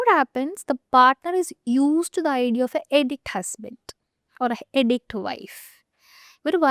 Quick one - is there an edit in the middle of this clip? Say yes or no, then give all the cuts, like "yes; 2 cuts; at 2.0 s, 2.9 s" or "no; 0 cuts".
no; 0 cuts